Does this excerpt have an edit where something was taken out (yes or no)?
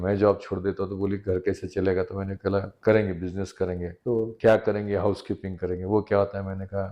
yes